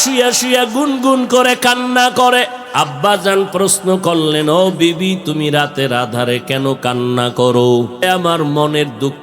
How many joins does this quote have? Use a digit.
2